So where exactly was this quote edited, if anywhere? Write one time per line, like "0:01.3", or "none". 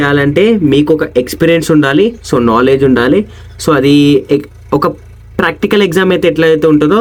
none